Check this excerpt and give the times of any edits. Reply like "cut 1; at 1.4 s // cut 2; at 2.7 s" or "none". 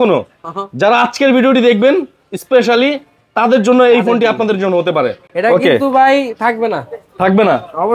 none